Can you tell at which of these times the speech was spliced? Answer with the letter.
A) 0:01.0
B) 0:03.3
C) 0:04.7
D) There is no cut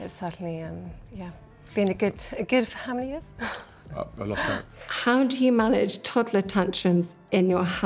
C